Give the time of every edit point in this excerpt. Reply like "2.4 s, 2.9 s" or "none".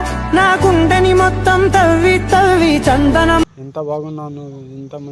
3.5 s